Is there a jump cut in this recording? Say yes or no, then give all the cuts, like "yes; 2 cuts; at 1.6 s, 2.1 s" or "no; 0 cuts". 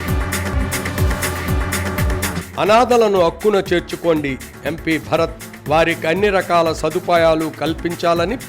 yes; 1 cut; at 2.4 s